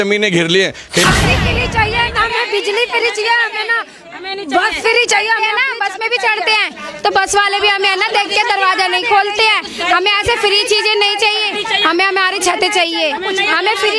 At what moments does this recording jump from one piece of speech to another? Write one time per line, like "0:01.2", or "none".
0:01.1